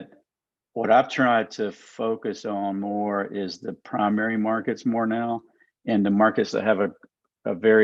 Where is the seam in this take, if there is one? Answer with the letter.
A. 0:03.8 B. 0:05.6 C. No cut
C